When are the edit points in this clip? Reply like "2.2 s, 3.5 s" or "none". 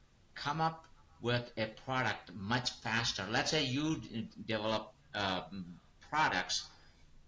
none